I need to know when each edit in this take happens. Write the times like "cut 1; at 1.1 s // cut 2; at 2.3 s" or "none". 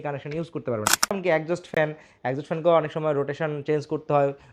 cut 1; at 1.2 s

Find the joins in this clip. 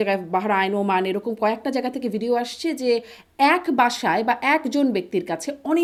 none

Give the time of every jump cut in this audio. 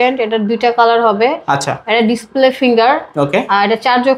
none

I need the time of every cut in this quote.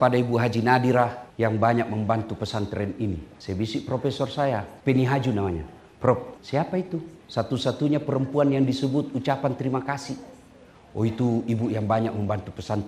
cut 1; at 1.2 s // cut 2; at 3.3 s // cut 3; at 4.7 s // cut 4; at 6.8 s

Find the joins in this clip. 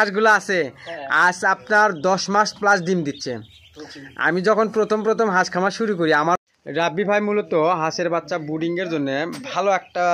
cut 1; at 6.4 s

